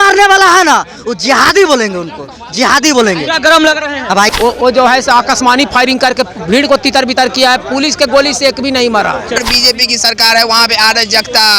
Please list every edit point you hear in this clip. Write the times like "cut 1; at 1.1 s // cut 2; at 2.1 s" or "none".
cut 1; at 4.3 s // cut 2; at 9.4 s